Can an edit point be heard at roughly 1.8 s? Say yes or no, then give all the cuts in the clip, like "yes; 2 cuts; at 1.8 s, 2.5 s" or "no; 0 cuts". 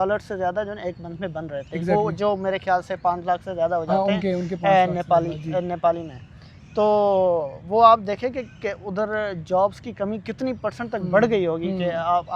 no; 0 cuts